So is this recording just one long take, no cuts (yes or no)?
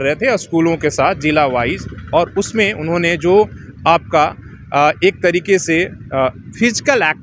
yes